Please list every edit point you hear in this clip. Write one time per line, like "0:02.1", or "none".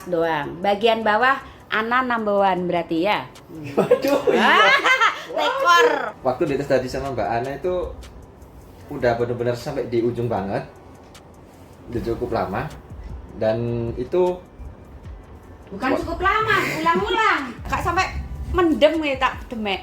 0:06.1
0:17.6